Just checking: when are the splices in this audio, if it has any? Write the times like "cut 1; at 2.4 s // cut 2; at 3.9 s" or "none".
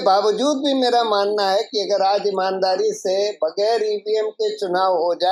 none